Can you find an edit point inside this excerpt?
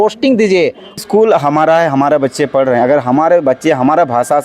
yes; 1 cut; at 1.0 s

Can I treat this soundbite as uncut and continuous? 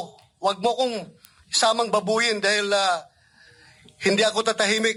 yes; 0 cuts

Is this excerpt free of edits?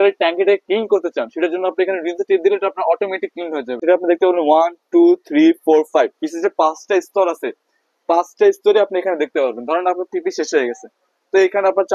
no; 1 cut; at 3.8 s

